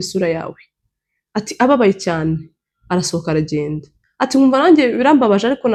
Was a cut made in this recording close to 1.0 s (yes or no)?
no